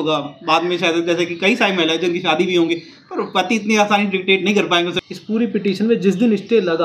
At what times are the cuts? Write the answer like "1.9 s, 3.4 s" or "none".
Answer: 4.9 s